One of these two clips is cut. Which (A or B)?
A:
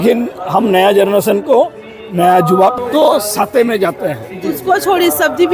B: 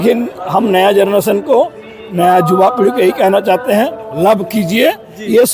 A